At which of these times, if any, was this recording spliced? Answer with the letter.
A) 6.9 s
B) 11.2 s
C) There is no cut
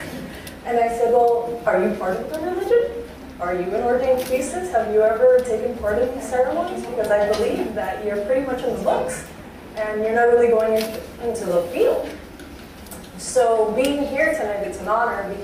A